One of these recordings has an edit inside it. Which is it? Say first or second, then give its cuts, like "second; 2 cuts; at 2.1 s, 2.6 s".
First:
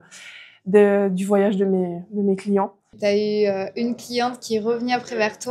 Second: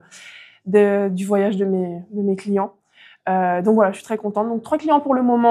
first; 1 cut; at 3.0 s